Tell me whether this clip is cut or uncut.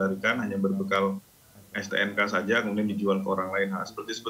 uncut